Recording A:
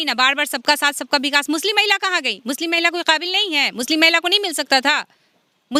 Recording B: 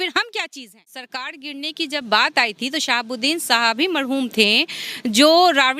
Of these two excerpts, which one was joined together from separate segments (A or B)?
B